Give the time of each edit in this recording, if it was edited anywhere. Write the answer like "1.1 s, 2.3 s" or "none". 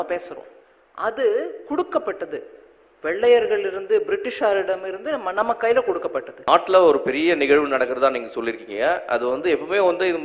6.3 s